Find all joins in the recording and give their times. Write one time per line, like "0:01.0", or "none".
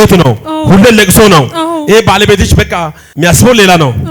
0:03.0